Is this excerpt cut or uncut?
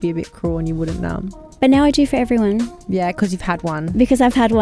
cut